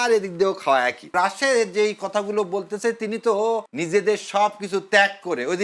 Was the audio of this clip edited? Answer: yes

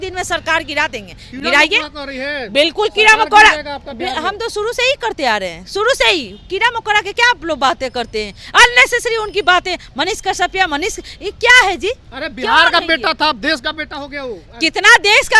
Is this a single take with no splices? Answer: yes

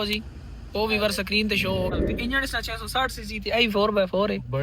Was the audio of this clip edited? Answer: yes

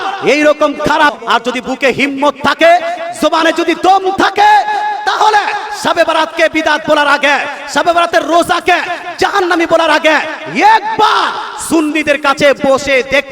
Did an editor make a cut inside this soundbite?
yes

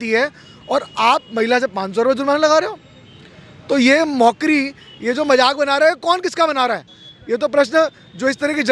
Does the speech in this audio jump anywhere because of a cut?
no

